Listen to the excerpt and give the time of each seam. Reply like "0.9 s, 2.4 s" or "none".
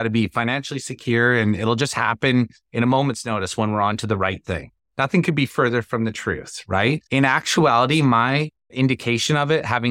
4.7 s, 7.0 s, 8.6 s